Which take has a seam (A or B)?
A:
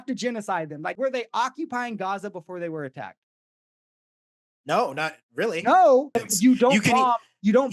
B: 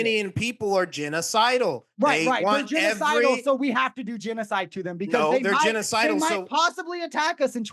A